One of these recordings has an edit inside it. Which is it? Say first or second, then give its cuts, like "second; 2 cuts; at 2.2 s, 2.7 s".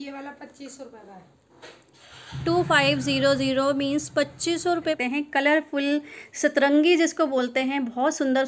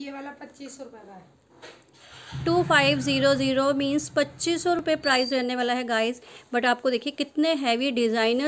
first; 1 cut; at 4.8 s